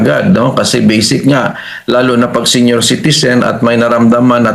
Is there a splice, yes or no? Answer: no